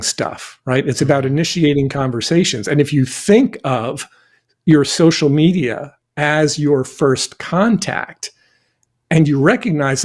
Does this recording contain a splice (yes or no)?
no